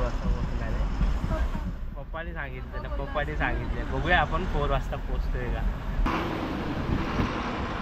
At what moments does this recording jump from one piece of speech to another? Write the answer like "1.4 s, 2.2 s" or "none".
6.0 s